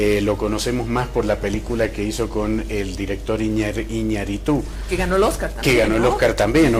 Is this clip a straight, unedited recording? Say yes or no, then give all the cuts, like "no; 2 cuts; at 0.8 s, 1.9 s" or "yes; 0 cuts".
yes; 0 cuts